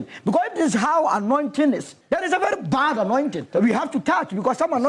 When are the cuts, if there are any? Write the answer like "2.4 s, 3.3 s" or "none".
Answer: 1.9 s, 3.5 s